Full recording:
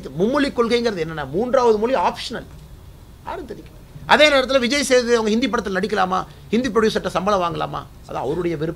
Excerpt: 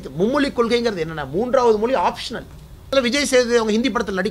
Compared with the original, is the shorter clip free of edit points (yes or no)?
no